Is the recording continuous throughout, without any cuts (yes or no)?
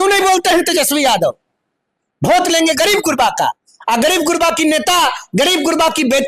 yes